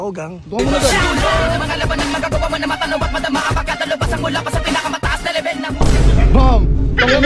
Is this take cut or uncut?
uncut